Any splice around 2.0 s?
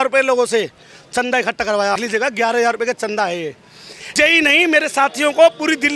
yes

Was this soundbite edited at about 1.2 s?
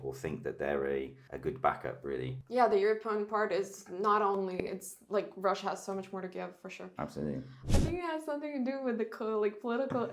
yes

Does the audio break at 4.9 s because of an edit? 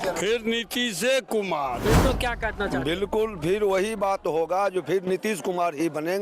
no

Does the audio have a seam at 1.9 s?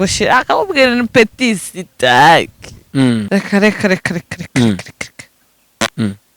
no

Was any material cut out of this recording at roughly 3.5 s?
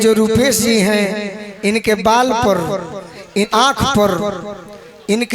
yes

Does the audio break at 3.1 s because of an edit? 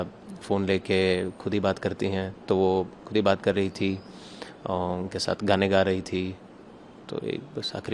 no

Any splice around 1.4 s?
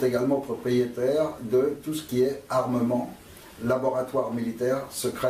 no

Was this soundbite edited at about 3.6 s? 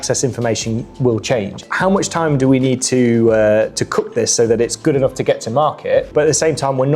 no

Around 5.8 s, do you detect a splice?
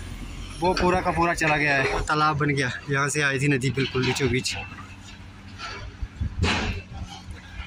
no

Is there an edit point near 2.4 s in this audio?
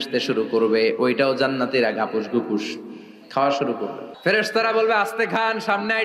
no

